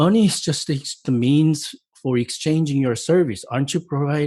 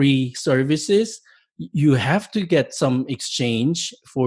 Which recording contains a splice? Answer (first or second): first